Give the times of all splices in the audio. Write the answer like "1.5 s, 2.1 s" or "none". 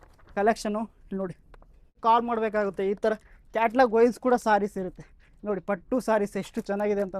1.9 s

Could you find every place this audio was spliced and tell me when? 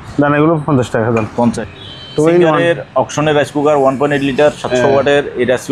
1.7 s

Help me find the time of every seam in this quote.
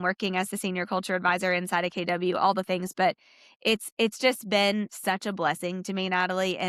none

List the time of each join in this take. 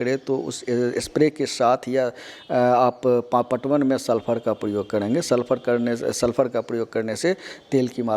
none

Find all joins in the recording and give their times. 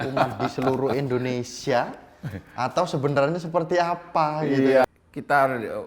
4.8 s

